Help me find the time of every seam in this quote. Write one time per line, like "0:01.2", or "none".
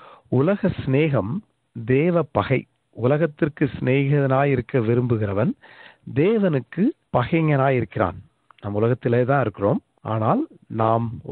0:07.0
0:09.9